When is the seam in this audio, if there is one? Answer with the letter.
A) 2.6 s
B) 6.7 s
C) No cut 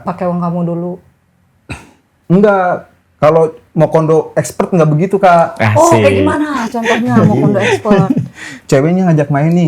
C